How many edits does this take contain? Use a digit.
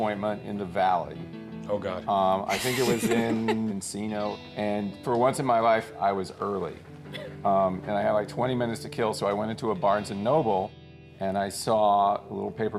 1